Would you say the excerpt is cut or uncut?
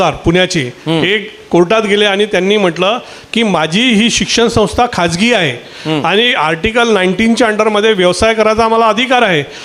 uncut